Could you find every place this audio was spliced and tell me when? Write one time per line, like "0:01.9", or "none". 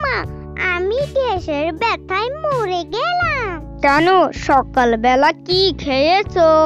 0:03.7